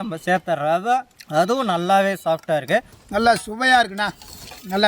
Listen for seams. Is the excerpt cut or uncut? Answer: cut